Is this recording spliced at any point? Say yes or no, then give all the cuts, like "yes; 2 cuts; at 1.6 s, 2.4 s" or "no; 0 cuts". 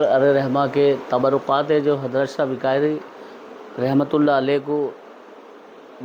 no; 0 cuts